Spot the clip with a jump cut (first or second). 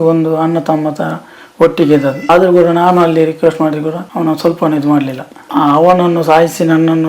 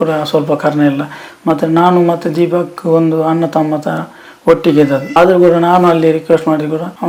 first